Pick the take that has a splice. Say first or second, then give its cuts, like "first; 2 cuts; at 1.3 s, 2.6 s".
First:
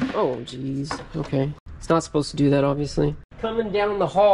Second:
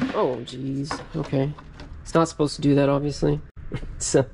first; 2 cuts; at 1.7 s, 3.3 s